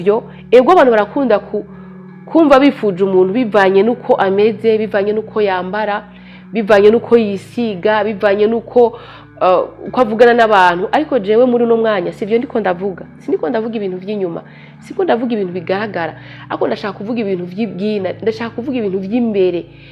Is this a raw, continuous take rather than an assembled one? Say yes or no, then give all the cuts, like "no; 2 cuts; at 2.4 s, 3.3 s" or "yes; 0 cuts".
yes; 0 cuts